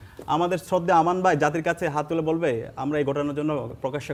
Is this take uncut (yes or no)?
yes